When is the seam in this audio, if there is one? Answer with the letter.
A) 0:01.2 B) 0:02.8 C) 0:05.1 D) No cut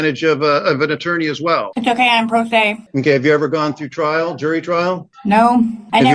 B